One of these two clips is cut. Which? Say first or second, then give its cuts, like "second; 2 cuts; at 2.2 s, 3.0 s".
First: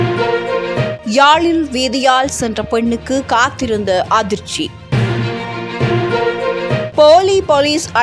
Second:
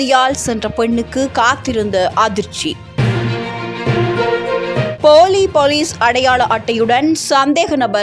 first; 1 cut; at 0.9 s